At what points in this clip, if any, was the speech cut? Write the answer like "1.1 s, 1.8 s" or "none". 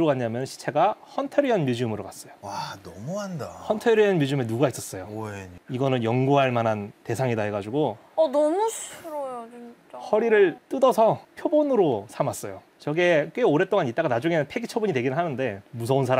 none